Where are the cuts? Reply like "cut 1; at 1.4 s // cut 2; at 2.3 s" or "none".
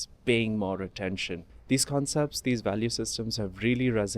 cut 1; at 1.5 s